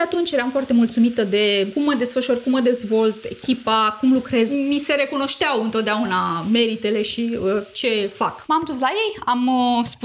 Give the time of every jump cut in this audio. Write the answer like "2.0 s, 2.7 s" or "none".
1.7 s, 4.5 s, 8.4 s